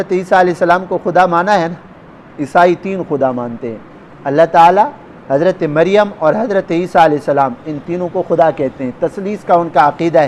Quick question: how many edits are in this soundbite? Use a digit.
0